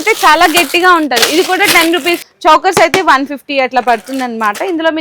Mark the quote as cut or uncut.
cut